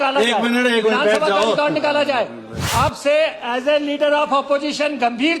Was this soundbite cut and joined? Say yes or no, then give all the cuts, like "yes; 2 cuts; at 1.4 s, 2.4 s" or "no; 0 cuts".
yes; 1 cut; at 2.5 s